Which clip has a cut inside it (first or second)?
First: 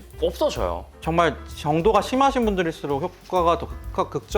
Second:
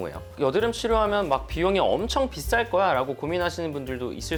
first